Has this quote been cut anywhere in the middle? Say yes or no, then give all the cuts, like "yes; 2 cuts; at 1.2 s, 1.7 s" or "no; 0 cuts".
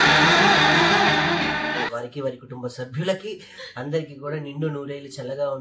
no; 0 cuts